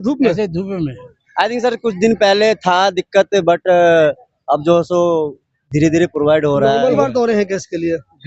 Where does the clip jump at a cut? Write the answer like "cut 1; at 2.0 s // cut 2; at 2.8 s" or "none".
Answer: cut 1; at 1.2 s // cut 2; at 6.8 s